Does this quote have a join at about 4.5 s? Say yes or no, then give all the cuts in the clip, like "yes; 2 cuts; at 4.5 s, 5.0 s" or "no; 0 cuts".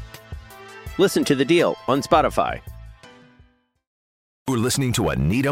yes; 1 cut; at 4.5 s